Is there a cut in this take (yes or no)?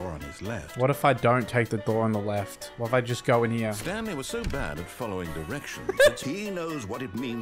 yes